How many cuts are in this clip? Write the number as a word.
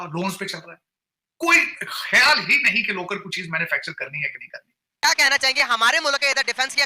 one